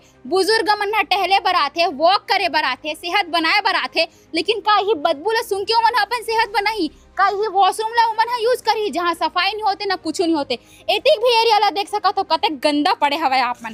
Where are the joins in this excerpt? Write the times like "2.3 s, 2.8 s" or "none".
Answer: none